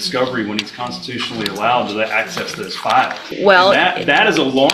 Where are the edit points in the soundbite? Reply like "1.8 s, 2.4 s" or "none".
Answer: 3.2 s

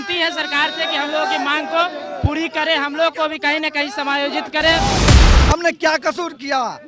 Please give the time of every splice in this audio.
5.1 s

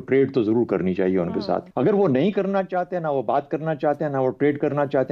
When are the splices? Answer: 1.6 s

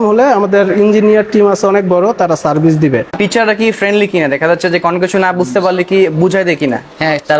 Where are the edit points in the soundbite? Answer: 3.1 s

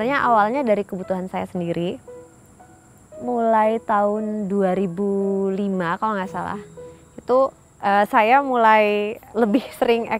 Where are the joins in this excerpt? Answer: 2.6 s, 9.2 s

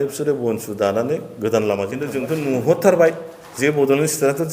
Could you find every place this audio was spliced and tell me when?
2.2 s

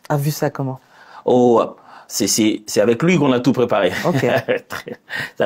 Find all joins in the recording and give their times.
none

